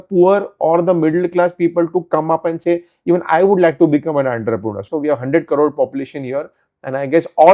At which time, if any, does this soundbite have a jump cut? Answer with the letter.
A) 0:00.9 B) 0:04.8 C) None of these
B